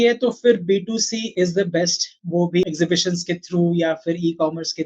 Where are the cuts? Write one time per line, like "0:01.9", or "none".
0:01.3
0:02.6